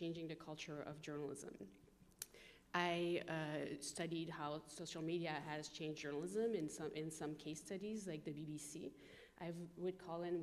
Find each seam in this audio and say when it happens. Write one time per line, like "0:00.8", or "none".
none